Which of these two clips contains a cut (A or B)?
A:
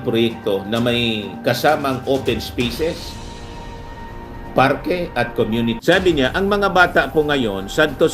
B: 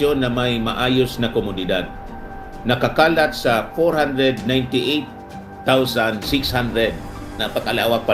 A